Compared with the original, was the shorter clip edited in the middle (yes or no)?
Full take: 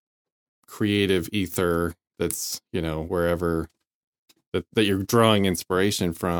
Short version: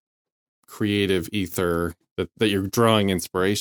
yes